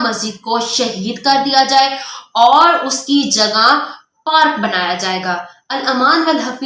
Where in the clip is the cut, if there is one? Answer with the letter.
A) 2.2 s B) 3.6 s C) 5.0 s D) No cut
D